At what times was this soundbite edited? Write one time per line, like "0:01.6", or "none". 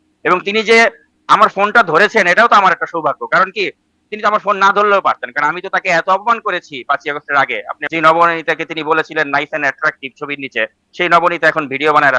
0:07.7